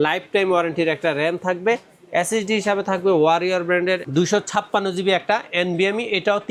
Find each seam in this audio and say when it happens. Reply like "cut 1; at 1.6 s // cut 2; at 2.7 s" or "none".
none